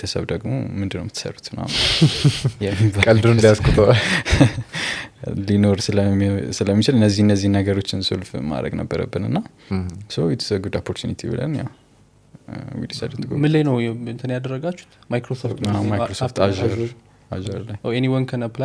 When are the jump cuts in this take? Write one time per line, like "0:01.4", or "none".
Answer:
none